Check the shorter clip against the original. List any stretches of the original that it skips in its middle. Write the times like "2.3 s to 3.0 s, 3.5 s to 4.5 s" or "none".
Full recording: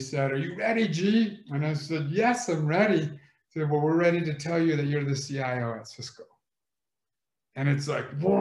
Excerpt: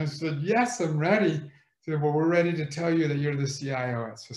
none